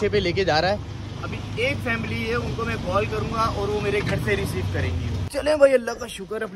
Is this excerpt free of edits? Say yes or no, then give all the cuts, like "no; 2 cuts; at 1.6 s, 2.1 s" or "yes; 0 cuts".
yes; 0 cuts